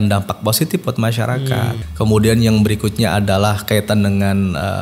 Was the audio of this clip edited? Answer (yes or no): yes